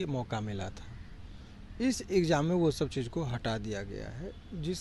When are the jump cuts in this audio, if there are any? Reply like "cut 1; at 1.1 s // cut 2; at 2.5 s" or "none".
none